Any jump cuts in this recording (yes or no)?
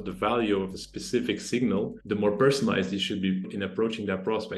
yes